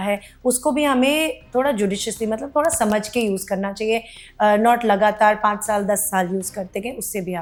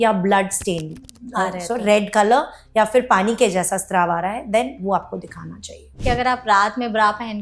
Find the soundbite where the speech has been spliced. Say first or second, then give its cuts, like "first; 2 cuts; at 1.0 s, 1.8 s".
second; 1 cut; at 5.9 s